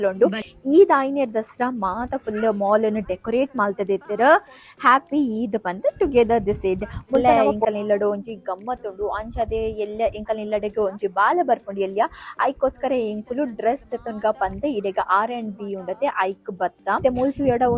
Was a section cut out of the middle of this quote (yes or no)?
yes